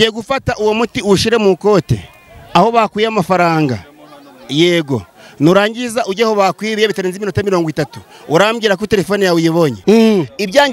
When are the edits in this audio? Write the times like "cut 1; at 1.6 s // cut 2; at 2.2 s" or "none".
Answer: cut 1; at 9.8 s